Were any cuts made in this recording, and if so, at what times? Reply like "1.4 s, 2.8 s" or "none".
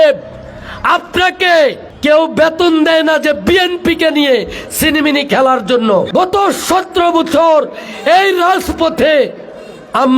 1.9 s, 6.1 s